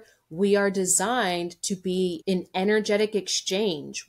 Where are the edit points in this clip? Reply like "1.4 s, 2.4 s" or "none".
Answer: 2.2 s